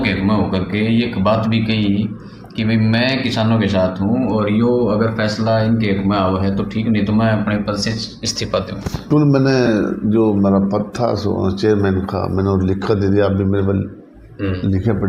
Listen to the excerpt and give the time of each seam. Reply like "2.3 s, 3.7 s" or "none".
9.1 s